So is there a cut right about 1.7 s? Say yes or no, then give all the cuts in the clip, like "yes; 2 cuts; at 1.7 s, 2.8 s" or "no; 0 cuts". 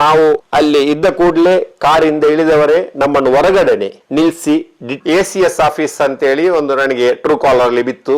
no; 1 cut; at 4.8 s